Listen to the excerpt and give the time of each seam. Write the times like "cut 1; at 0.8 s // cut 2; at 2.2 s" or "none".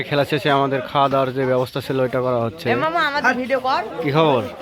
none